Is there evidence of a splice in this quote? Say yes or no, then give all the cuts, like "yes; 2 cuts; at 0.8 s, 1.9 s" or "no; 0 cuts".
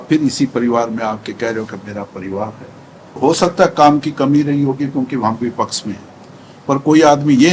yes; 1 cut; at 3.2 s